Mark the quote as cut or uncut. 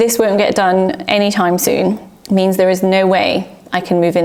uncut